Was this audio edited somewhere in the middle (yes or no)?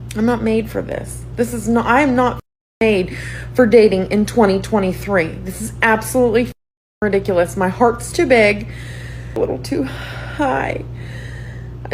yes